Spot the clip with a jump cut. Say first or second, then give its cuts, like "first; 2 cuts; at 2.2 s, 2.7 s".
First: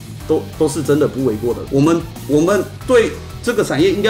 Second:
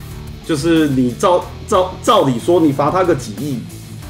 first; 1 cut; at 1.6 s